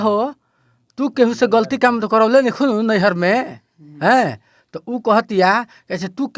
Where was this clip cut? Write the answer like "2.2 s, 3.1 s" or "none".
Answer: none